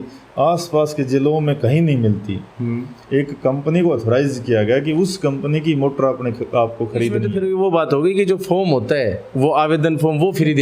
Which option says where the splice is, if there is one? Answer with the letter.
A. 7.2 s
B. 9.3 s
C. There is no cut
A